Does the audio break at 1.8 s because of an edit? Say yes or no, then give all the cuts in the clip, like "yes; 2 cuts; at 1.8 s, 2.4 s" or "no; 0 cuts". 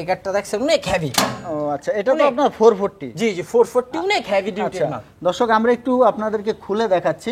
no; 0 cuts